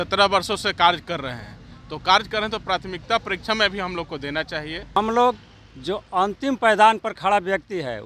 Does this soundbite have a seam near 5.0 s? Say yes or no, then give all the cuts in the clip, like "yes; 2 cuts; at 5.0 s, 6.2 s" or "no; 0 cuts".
yes; 1 cut; at 5.0 s